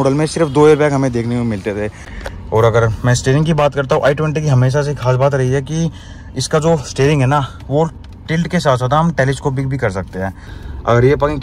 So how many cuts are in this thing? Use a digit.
2